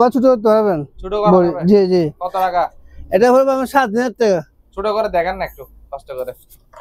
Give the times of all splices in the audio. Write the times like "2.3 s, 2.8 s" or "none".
none

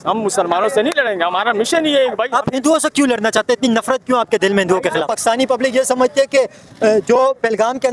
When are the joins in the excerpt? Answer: 5.1 s

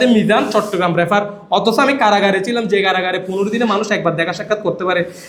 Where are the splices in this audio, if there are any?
none

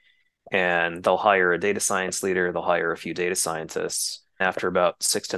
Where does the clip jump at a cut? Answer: 4.4 s

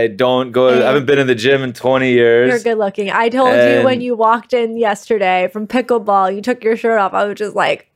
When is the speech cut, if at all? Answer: none

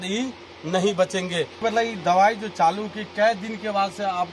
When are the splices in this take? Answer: 1.6 s

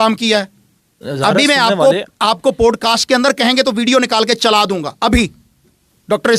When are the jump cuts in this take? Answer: 1.0 s

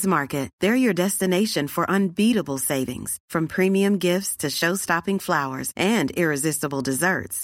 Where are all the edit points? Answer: none

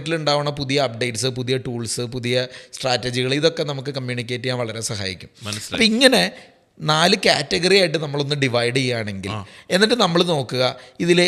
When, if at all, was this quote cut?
none

